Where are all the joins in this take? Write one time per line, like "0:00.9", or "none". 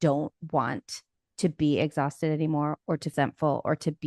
0:03.1